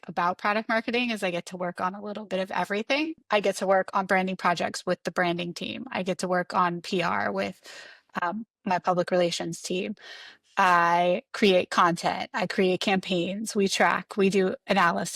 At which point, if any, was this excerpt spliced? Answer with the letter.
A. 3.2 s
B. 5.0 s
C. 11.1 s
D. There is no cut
A